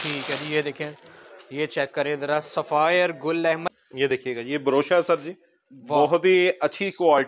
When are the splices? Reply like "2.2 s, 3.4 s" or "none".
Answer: 3.6 s